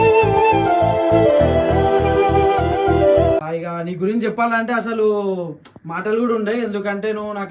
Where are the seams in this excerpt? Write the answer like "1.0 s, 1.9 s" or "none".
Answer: none